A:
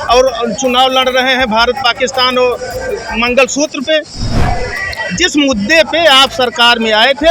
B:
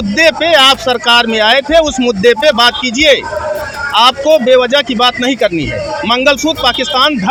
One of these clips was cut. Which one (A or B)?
A